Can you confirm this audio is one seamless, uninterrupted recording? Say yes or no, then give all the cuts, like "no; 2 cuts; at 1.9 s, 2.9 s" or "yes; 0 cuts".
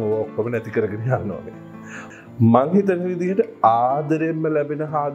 no; 1 cut; at 2.0 s